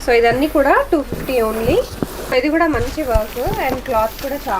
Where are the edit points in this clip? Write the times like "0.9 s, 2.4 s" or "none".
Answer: 2.3 s